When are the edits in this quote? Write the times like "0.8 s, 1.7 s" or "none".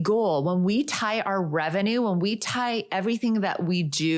none